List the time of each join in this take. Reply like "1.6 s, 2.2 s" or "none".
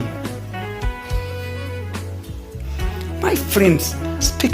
none